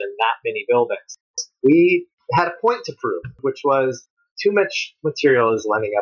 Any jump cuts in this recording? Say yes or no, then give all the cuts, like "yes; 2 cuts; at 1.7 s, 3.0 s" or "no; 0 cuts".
yes; 1 cut; at 1.4 s